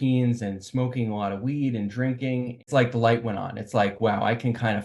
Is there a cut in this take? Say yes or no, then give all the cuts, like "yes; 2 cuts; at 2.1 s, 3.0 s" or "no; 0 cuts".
yes; 1 cut; at 2.6 s